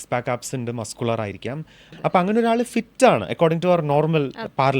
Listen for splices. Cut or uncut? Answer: cut